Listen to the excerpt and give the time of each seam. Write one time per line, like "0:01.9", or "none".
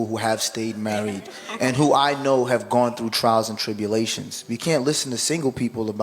0:04.5